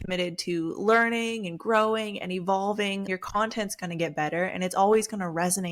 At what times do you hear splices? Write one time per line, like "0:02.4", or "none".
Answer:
0:03.1